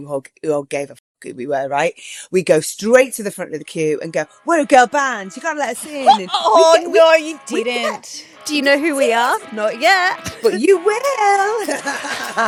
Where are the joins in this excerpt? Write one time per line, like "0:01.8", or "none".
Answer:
none